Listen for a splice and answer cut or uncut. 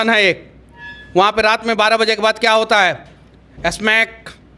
uncut